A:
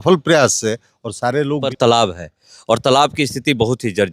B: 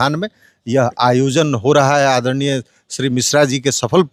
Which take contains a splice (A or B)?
A